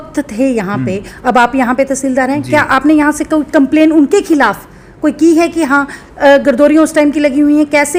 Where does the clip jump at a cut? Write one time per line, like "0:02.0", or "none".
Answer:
none